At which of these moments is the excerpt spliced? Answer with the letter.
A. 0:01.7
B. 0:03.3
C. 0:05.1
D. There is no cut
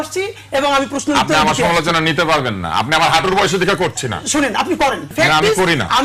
C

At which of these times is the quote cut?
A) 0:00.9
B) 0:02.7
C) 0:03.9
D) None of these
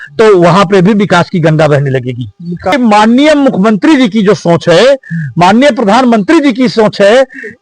B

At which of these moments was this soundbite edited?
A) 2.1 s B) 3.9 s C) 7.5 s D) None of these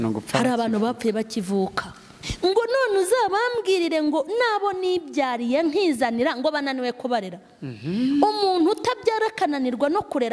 A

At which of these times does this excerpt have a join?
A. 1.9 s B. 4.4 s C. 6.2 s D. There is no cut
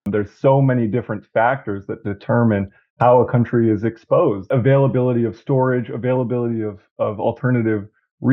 B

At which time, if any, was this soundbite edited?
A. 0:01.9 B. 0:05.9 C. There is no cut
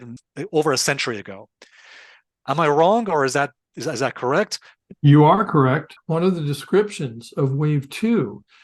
B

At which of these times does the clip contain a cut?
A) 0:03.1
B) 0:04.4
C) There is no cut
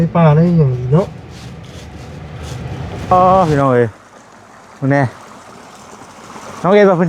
A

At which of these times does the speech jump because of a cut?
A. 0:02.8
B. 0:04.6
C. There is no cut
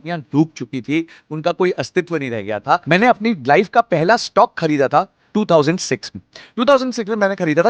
A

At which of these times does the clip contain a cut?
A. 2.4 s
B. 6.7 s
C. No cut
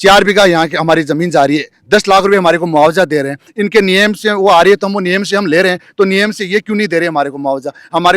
C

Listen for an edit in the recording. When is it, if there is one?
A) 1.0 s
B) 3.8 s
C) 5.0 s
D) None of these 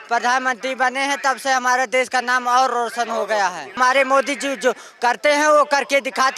B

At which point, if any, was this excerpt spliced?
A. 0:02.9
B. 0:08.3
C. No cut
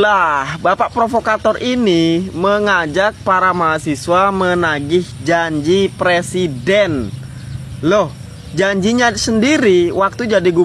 C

